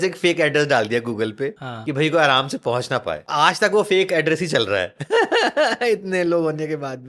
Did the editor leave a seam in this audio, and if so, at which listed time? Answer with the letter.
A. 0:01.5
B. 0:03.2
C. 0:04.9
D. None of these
B